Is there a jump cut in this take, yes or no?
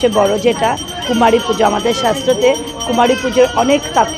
no